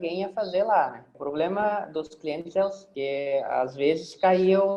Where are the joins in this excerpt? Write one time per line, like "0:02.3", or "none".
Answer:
0:01.1
0:02.8